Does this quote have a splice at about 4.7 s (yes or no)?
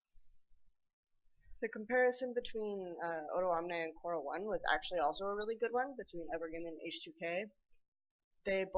no